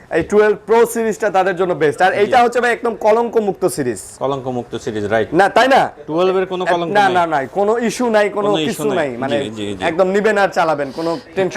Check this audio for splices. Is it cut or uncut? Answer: uncut